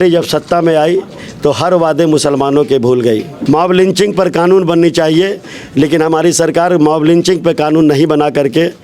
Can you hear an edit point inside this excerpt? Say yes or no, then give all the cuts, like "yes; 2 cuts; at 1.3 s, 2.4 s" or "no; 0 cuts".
yes; 1 cut; at 3.3 s